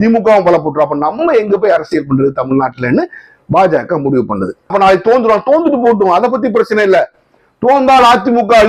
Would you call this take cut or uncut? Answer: cut